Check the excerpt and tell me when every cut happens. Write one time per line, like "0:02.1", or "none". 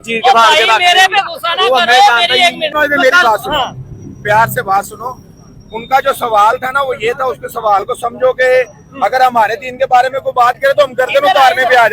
0:02.7